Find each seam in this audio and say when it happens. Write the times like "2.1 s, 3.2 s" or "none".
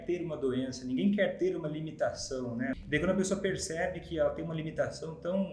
2.7 s